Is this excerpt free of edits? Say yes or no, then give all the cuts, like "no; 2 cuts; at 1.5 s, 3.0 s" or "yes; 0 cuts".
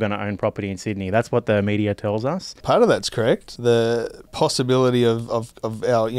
no; 3 cuts; at 2.5 s, 3.5 s, 4.2 s